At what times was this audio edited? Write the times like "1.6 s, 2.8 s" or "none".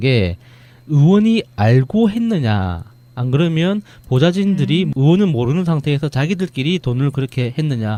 none